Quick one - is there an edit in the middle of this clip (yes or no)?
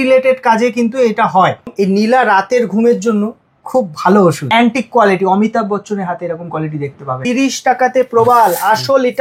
yes